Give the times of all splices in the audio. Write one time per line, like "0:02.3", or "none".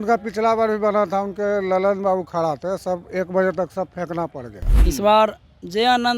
0:04.8